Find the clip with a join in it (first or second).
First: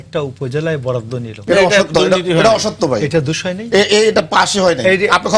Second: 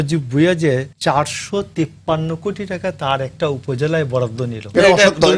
second